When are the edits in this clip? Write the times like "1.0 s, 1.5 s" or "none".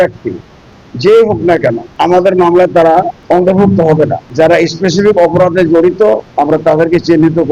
1.9 s, 3.2 s, 4.2 s, 6.3 s